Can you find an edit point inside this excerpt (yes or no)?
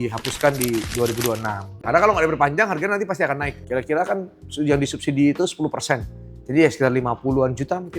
yes